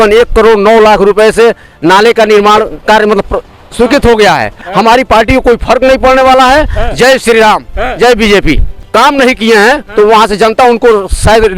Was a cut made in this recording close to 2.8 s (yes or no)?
no